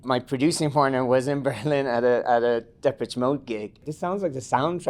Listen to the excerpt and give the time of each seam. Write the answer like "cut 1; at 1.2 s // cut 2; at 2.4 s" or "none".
cut 1; at 3.9 s